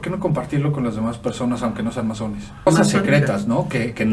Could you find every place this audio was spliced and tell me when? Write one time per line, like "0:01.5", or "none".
0:02.7